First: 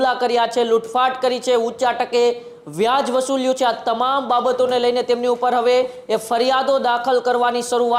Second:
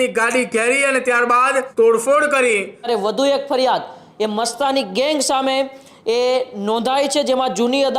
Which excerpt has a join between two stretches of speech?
second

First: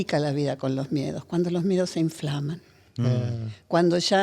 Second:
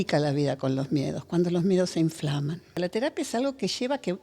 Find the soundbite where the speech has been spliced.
second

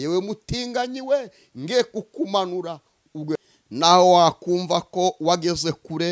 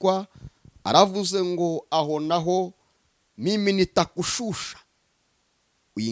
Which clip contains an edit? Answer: first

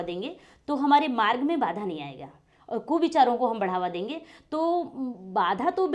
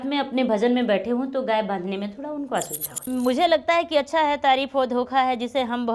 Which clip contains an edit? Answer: second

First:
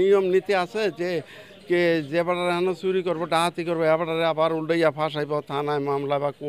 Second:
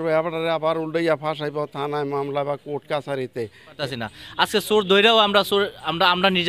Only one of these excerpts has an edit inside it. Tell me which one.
second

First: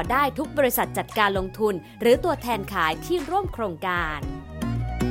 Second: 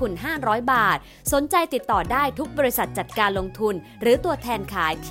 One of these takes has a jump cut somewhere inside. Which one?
first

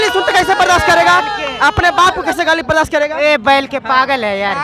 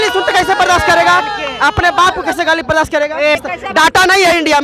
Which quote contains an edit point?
second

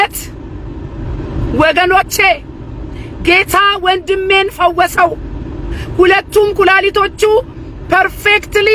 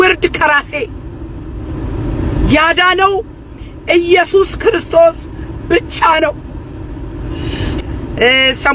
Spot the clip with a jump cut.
second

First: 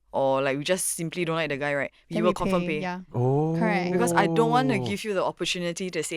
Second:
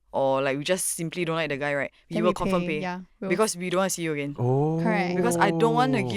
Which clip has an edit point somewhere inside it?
first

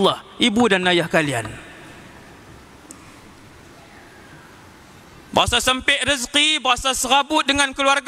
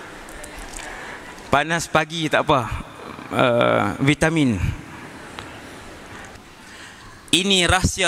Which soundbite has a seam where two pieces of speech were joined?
second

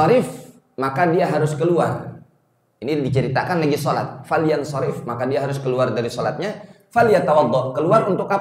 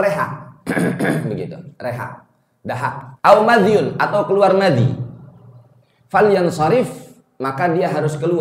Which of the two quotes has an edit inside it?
second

